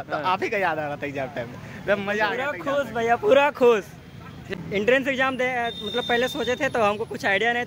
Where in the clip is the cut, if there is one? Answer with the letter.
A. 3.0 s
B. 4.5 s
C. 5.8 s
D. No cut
B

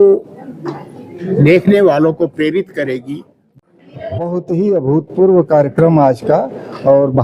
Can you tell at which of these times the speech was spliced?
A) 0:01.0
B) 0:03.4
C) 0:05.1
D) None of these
B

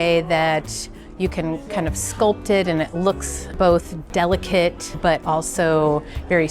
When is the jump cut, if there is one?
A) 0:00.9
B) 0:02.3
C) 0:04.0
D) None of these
C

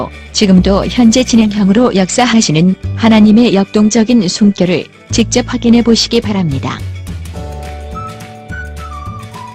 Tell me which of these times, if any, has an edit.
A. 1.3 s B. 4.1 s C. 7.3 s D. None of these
A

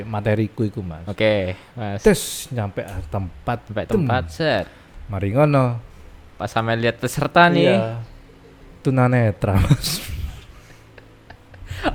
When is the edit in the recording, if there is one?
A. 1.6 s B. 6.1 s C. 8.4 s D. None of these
D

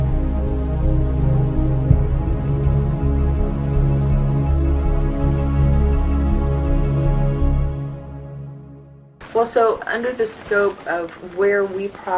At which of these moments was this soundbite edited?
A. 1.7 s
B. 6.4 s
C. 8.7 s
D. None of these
D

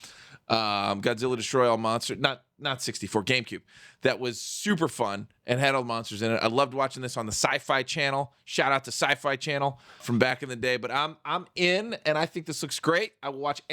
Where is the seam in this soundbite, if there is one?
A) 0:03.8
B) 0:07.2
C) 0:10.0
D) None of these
C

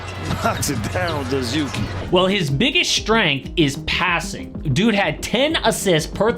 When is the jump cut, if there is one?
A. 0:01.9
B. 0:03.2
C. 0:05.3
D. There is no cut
A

